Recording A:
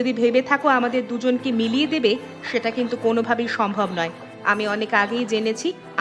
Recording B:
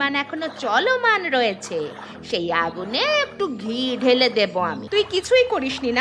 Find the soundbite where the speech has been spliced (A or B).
B